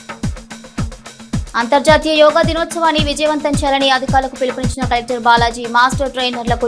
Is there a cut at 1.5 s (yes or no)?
yes